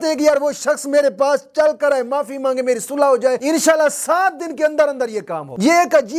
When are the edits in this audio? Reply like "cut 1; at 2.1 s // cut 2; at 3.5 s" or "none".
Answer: none